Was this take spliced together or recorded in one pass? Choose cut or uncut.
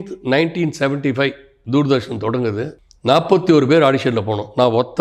cut